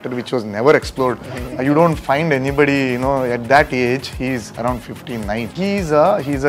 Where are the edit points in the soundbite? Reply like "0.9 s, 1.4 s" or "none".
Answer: 5.5 s